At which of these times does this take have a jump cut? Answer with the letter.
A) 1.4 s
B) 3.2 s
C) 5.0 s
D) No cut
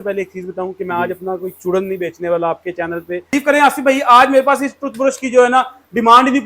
B